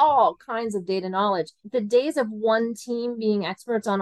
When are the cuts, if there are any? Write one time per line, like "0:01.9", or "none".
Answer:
0:01.6